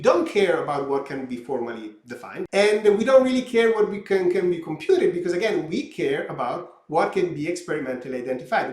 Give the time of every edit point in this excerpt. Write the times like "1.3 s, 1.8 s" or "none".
2.4 s